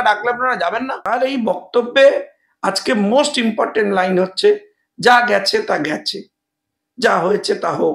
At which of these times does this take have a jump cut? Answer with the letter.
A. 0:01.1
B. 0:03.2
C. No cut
A